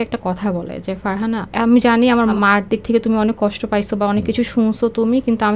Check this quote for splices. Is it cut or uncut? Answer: cut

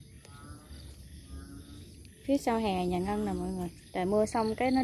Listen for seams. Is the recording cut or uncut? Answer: cut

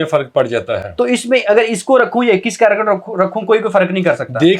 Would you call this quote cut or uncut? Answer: uncut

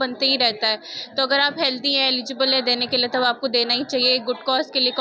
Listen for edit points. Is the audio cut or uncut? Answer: uncut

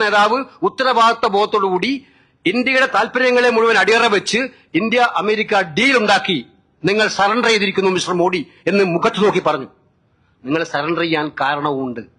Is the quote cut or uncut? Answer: uncut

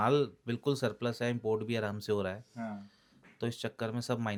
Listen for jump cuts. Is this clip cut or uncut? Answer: uncut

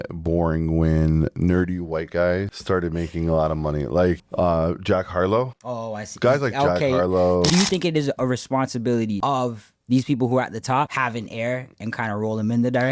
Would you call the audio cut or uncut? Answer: cut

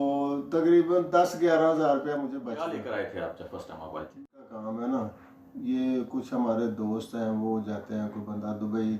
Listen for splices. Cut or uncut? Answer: cut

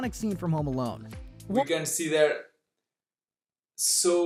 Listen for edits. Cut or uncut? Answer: uncut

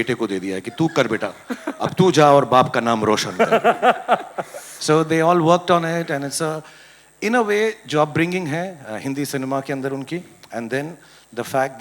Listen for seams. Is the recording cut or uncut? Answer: uncut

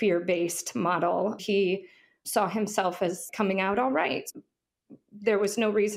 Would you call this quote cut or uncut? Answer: cut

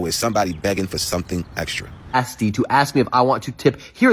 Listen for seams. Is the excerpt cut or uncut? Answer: cut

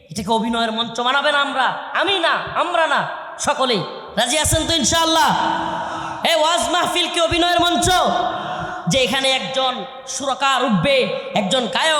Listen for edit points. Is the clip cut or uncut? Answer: uncut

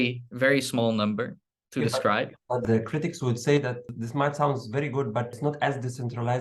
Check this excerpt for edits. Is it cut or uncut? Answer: cut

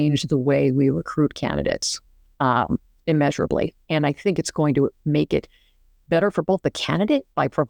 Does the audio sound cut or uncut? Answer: uncut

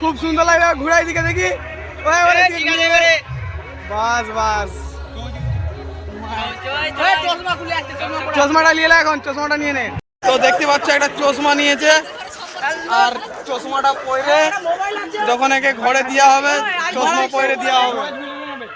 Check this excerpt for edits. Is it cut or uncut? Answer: cut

